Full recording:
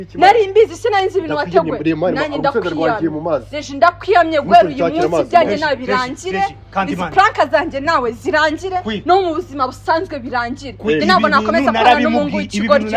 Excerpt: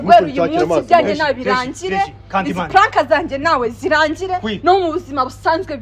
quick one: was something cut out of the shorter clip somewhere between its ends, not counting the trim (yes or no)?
no